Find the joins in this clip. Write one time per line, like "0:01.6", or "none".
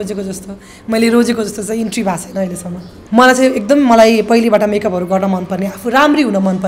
0:03.0